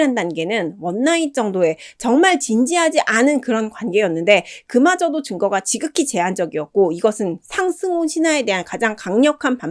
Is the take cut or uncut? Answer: uncut